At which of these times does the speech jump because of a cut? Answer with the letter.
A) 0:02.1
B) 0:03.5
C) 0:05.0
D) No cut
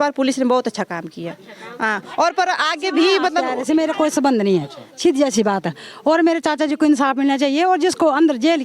B